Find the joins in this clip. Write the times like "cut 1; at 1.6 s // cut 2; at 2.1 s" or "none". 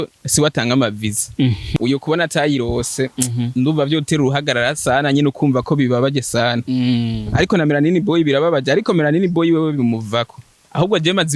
cut 1; at 1.6 s